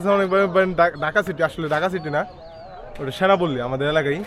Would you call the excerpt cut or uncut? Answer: uncut